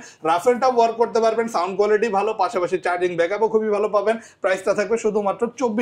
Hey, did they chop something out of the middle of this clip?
no; 0 cuts

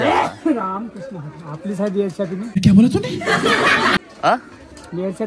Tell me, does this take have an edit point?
no; 0 cuts

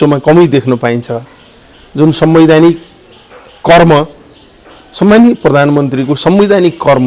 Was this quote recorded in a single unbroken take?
yes; 0 cuts

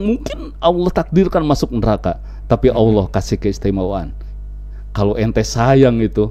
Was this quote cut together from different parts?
no; 0 cuts

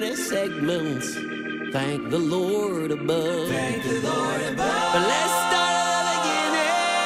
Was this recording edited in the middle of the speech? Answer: no; 0 cuts

